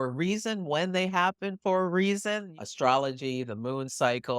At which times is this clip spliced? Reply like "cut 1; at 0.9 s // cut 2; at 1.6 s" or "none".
cut 1; at 2.6 s